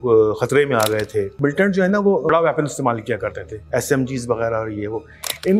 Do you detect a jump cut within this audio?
yes; 3 cuts; at 1.3 s, 2.3 s, 3.5 s

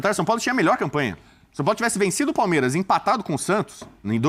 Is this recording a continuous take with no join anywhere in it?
yes; 0 cuts

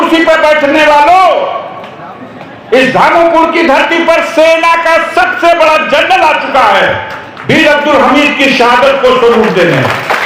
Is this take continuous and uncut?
yes; 0 cuts

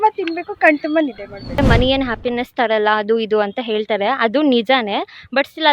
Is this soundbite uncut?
no; 1 cut; at 1.6 s

